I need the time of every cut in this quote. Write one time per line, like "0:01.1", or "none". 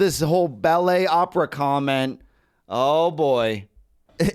none